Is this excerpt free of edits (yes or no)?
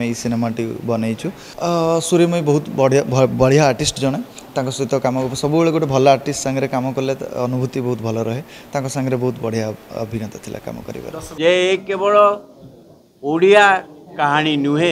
no